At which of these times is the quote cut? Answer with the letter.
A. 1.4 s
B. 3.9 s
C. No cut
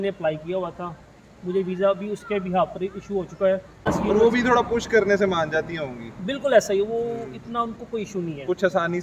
B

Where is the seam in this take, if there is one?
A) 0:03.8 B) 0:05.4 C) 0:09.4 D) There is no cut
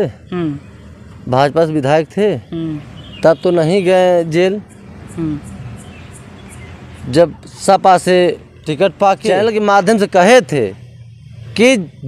C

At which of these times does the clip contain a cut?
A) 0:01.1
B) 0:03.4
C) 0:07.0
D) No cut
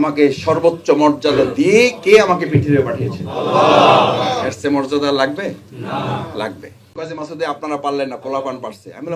C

